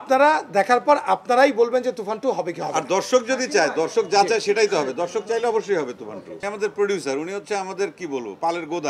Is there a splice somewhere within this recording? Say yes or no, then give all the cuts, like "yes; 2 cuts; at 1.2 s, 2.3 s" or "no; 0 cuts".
yes; 1 cut; at 6.4 s